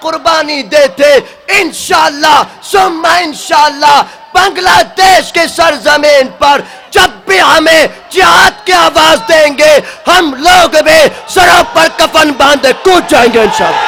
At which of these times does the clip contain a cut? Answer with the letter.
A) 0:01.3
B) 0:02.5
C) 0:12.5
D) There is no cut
D